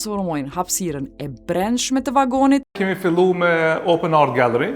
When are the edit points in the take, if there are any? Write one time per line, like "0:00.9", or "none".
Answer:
0:02.7